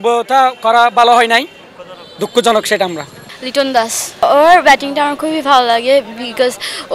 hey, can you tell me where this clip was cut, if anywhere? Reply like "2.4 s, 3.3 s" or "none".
3.0 s, 4.2 s